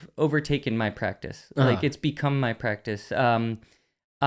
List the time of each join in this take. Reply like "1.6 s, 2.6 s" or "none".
none